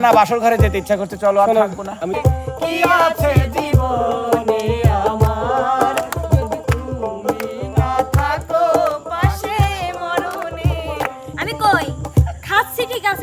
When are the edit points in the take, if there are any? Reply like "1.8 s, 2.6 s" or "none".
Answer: 2.2 s, 11.4 s